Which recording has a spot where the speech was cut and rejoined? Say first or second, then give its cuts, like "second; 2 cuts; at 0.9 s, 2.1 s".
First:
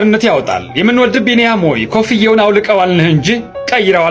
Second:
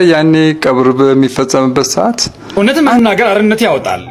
second; 1 cut; at 2.4 s